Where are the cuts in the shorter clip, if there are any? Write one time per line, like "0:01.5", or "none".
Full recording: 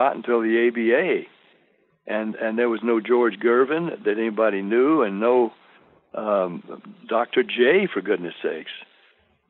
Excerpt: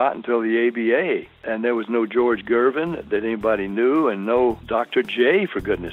0:01.4
0:04.6